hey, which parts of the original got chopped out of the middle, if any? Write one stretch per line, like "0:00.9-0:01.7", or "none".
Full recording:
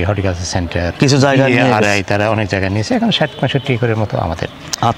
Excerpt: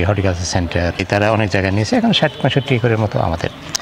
0:01.0-0:01.9